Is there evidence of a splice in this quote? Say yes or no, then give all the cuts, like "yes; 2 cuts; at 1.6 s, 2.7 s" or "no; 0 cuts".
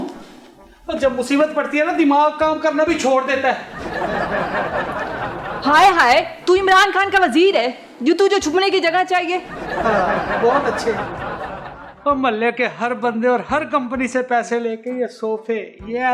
no; 0 cuts